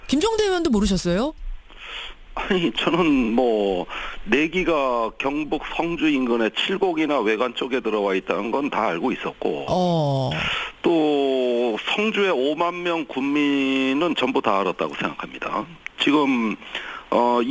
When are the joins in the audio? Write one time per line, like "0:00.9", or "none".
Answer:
0:01.5